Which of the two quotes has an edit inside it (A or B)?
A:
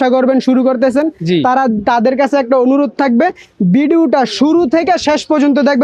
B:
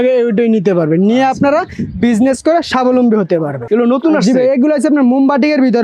B